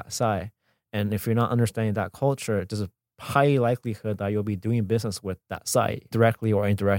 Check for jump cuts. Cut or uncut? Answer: cut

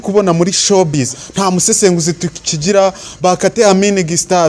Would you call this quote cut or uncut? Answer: cut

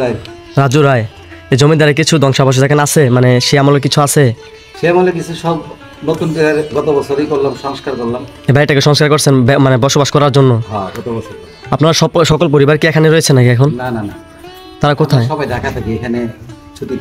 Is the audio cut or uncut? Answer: uncut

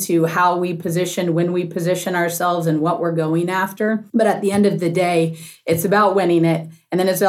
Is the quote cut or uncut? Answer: uncut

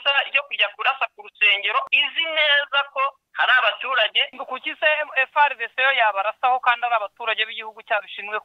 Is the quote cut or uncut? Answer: cut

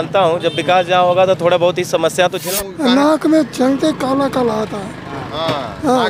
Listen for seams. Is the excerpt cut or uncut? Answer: cut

